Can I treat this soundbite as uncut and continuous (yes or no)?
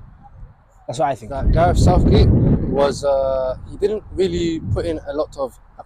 no